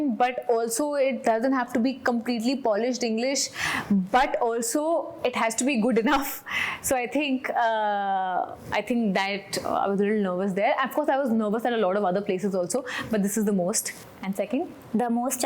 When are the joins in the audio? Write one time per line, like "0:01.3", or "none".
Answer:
none